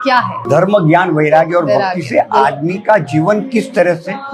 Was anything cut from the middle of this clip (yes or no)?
no